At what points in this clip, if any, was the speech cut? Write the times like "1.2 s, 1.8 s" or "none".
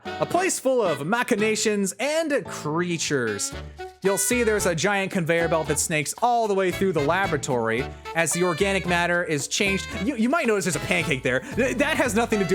none